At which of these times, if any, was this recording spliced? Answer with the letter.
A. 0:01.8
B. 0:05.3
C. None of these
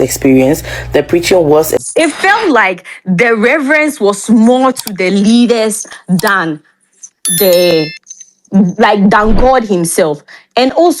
A